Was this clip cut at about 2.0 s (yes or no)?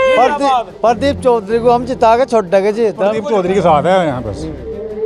no